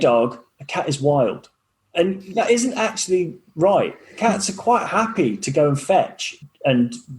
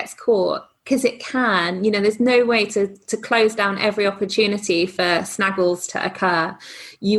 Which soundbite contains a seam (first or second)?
first